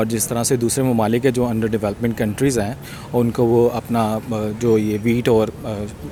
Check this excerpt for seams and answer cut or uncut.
uncut